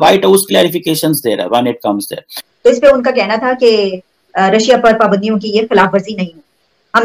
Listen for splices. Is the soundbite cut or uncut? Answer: uncut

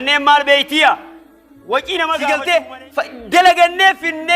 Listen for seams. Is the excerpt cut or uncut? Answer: cut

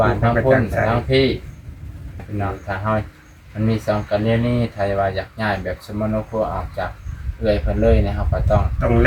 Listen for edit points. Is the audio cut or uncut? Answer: cut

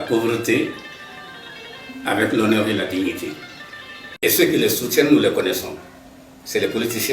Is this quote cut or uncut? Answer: cut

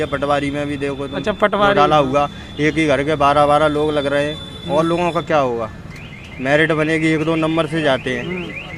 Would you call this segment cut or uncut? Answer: uncut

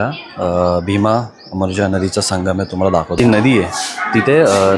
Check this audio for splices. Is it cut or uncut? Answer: uncut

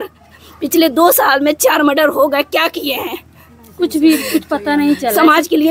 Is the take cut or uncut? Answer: uncut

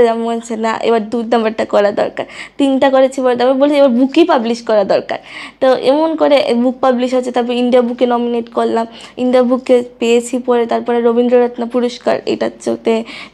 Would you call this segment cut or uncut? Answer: uncut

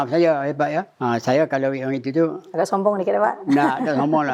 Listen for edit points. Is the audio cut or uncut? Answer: cut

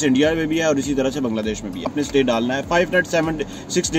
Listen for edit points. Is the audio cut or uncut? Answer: cut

